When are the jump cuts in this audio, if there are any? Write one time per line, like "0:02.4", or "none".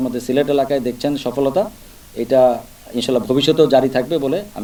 none